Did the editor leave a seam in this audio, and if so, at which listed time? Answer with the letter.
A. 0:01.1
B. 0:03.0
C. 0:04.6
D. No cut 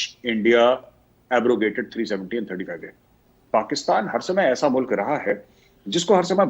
B